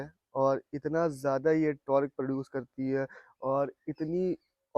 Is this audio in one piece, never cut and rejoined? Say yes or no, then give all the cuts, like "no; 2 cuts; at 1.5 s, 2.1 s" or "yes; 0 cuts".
yes; 0 cuts